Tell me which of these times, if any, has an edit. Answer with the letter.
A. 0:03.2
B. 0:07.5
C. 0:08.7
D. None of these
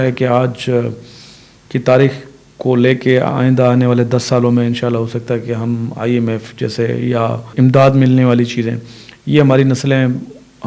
B